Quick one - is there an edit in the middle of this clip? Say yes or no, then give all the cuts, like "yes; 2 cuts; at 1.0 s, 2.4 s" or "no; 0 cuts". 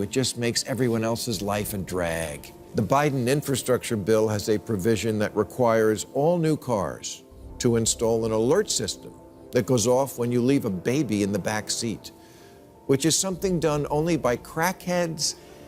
yes; 1 cut; at 2.5 s